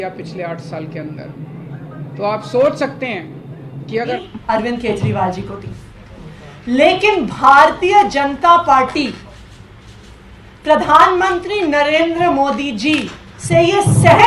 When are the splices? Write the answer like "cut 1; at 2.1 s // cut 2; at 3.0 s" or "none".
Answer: cut 1; at 4.2 s